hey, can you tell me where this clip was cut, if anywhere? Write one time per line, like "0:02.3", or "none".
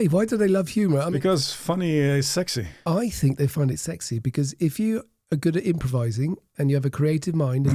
0:01.1
0:02.7